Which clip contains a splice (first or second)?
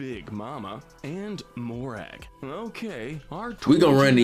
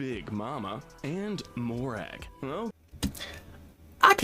second